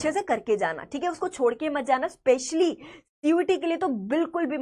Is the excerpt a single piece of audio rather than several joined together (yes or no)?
yes